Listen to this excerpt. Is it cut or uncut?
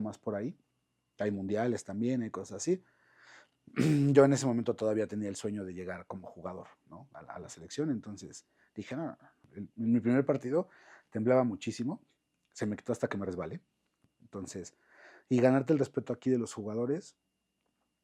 cut